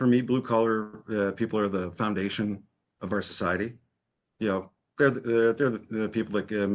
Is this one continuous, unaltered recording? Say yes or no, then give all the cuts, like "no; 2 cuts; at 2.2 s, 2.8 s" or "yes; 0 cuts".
yes; 0 cuts